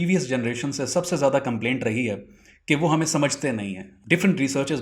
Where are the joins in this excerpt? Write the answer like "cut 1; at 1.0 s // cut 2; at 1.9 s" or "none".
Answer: cut 1; at 3.9 s

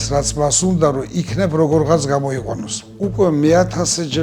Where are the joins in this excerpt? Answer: cut 1; at 2.8 s

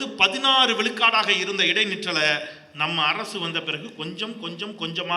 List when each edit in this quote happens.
none

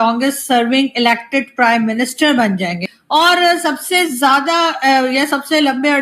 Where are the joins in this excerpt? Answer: cut 1; at 2.8 s

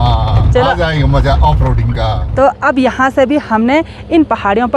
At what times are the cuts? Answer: cut 1; at 2.2 s

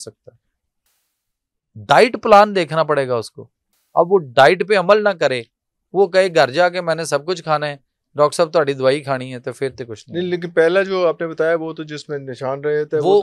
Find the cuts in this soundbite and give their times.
none

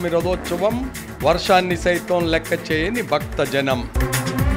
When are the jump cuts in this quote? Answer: none

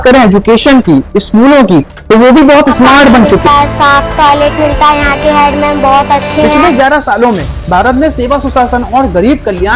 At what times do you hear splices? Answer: cut 1; at 3.4 s // cut 2; at 6.6 s

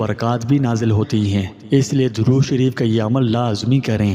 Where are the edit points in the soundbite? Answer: none

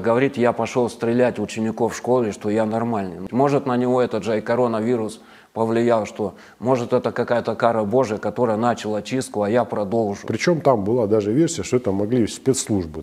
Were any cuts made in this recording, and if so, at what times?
cut 1; at 3.2 s // cut 2; at 10.3 s

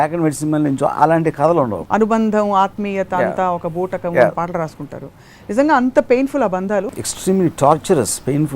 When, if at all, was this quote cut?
cut 1; at 1.8 s // cut 2; at 6.9 s

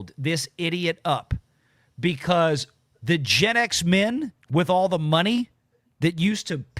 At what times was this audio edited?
cut 1; at 4.4 s

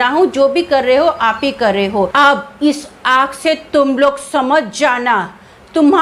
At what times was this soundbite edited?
cut 1; at 2.1 s

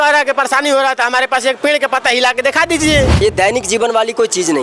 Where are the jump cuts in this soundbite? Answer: cut 1; at 3.2 s

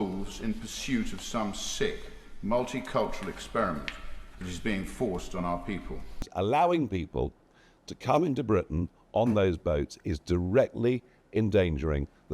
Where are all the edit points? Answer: cut 1; at 6.2 s

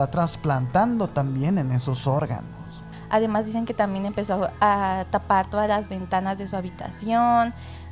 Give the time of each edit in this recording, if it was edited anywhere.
cut 1; at 2.9 s // cut 2; at 4.5 s

